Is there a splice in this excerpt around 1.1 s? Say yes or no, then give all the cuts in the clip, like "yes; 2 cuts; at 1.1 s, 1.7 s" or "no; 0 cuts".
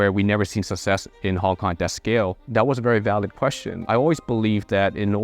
no; 2 cuts; at 2.4 s, 3.8 s